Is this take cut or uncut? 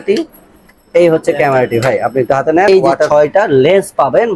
cut